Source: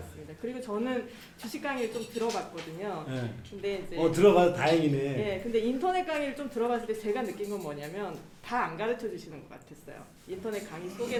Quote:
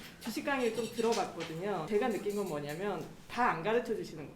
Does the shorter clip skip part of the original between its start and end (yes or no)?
yes